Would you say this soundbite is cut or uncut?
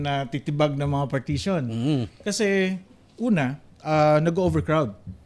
uncut